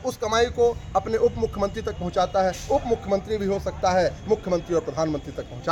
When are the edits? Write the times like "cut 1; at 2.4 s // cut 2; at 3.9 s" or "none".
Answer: none